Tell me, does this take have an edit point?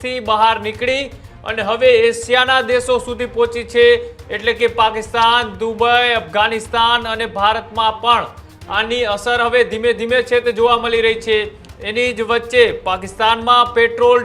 no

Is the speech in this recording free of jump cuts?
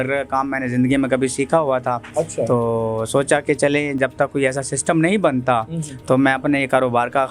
yes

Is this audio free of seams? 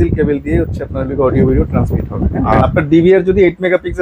no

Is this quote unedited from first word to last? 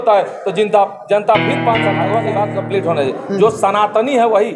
no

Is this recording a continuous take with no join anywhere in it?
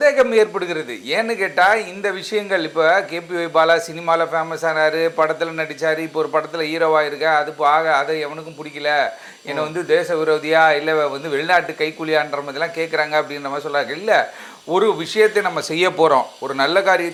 yes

